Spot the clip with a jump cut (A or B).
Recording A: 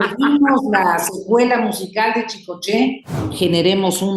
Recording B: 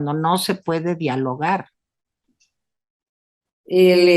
A